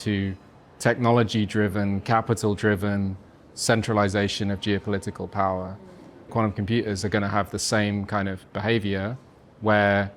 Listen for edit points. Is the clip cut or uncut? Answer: cut